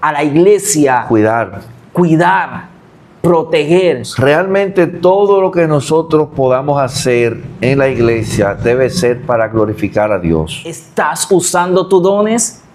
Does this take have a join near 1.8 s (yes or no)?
no